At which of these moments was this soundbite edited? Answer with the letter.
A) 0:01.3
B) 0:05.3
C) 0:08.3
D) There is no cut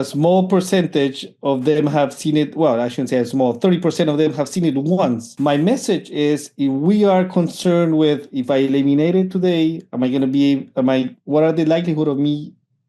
B